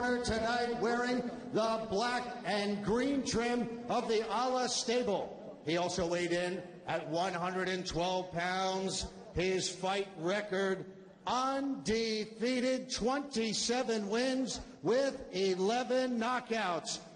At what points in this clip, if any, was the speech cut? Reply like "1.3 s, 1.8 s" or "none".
4.6 s